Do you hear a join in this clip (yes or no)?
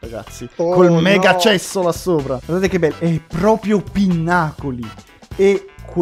yes